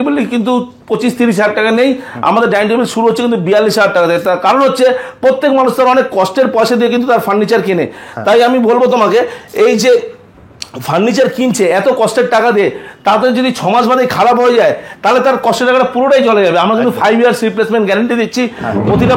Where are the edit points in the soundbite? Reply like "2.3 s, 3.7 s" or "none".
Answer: none